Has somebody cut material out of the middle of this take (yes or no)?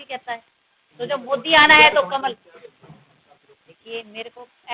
no